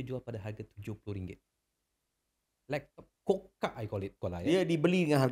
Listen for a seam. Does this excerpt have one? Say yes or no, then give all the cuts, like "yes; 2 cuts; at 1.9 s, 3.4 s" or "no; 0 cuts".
yes; 1 cut; at 4.1 s